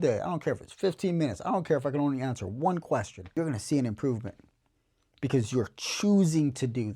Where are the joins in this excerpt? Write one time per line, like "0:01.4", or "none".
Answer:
0:03.4